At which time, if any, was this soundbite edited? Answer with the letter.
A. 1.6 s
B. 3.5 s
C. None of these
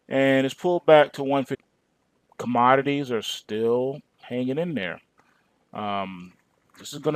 C